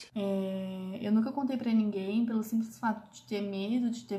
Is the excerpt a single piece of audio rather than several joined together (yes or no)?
yes